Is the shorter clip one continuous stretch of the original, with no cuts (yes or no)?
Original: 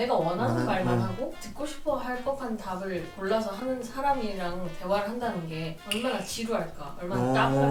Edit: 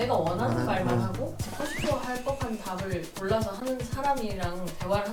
yes